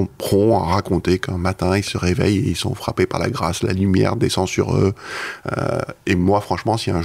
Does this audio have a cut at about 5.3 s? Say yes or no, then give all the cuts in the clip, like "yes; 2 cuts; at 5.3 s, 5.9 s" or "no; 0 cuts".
no; 0 cuts